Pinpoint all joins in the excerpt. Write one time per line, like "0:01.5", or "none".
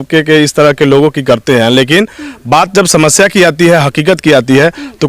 none